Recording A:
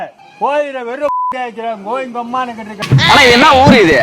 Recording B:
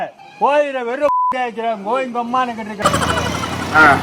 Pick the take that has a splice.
A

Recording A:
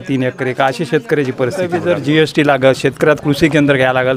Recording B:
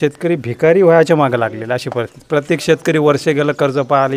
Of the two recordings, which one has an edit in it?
A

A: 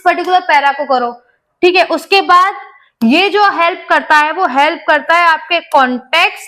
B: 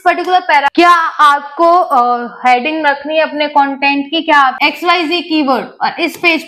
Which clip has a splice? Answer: B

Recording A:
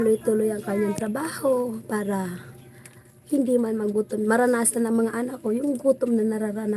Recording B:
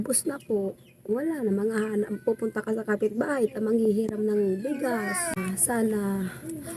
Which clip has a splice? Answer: B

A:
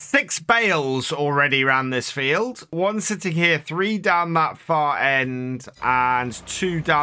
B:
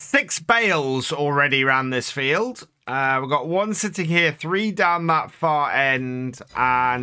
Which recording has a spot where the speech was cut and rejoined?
A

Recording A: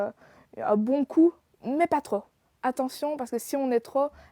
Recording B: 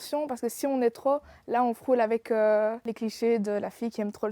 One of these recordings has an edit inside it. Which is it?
B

